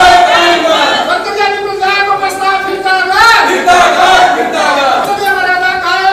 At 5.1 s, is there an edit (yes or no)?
yes